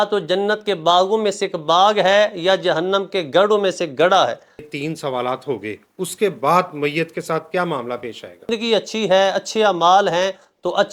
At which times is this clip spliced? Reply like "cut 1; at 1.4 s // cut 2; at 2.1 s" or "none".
cut 1; at 4.7 s // cut 2; at 8.5 s